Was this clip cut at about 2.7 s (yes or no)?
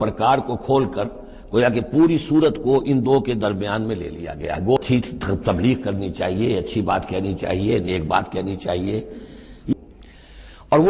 no